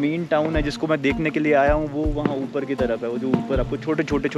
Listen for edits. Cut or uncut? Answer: uncut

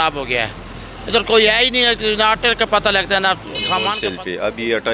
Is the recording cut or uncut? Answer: cut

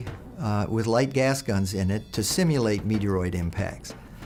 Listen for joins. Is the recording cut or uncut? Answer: uncut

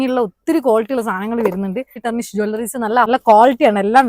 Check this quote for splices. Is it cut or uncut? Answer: cut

